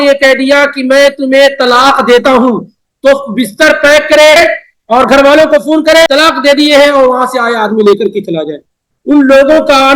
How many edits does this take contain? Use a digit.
2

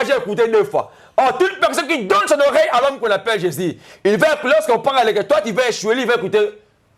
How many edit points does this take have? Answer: 0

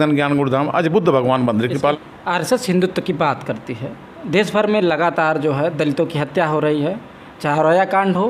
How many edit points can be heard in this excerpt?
1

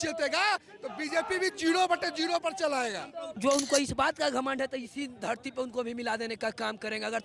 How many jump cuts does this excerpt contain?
1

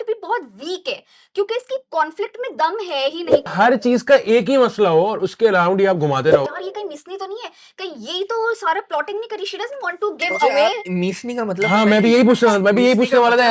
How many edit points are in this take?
2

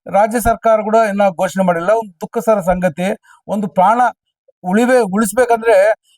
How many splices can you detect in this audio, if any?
0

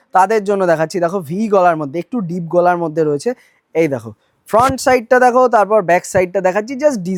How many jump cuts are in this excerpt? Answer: 0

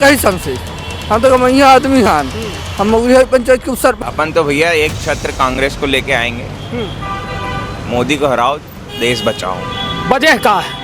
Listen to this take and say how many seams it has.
1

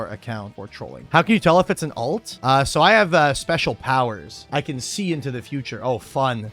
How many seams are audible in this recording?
1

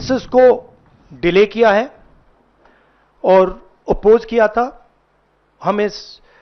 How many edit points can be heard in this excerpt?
0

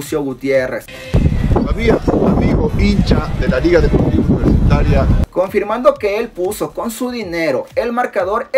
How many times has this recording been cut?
2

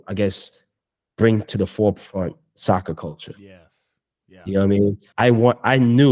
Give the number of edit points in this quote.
1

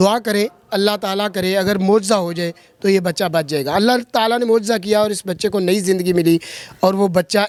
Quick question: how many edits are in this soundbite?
0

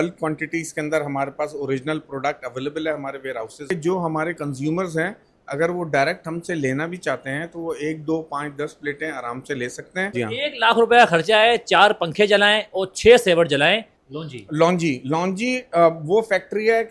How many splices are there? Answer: 3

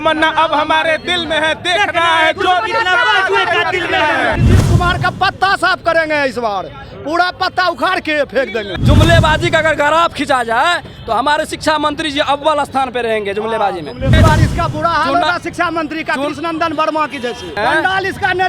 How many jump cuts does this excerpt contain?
4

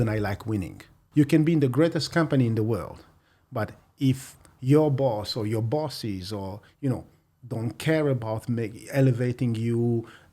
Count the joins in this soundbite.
1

